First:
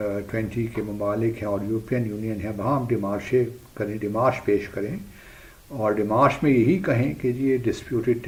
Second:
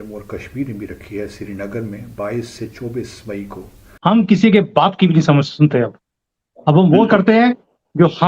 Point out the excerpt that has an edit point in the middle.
second; 1 cut; at 3.9 s

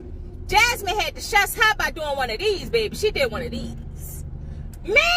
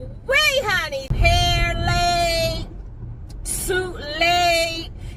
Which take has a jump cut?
second; 1 cut; at 1.1 s

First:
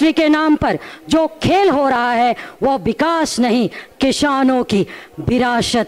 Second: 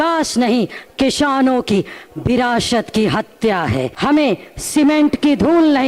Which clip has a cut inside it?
second; 1 cut; at 3.9 s

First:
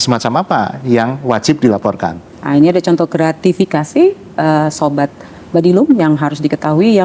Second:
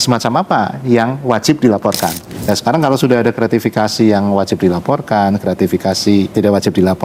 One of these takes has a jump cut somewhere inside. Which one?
second; 2 cuts; at 2.3 s, 6.3 s

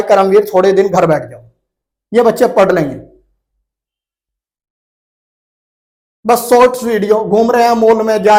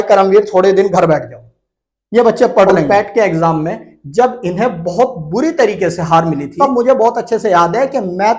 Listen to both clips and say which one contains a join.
second; 2 cuts; at 2.9 s, 6.5 s

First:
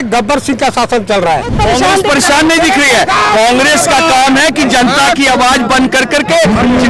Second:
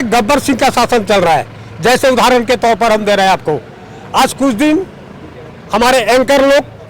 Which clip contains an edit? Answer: first; 1 cut; at 1.5 s

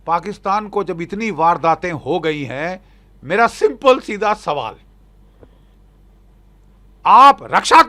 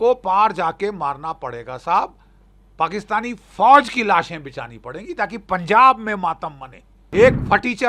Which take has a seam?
second; 1 cut; at 6.9 s

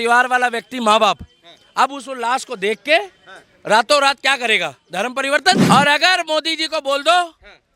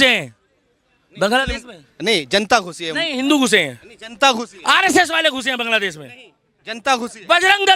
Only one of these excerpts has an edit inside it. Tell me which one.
first; 1 cut; at 5.6 s

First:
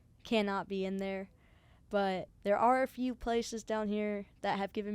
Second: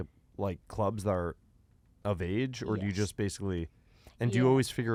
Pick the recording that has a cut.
first; 1 cut; at 2.3 s

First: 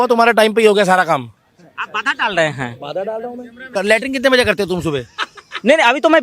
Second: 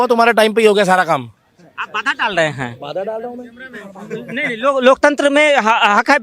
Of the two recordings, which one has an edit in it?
first; 1 cut; at 3.7 s

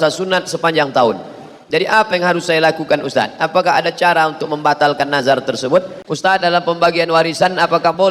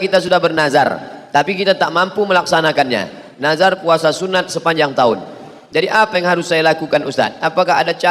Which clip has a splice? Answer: first; 1 cut; at 6.0 s

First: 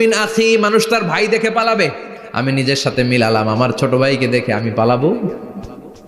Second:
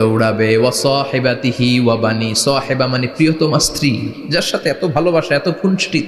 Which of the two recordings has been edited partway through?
first; 1 cut; at 2.4 s

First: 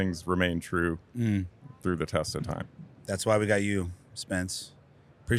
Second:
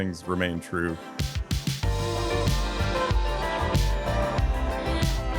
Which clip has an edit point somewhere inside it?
second; 1 cut; at 1.1 s

